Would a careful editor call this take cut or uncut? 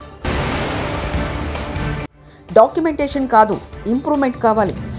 uncut